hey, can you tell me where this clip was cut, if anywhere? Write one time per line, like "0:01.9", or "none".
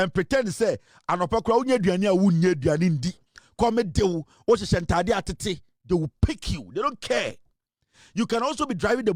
none